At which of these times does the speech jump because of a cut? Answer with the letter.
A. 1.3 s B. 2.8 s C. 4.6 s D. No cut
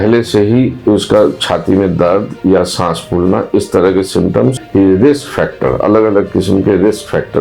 C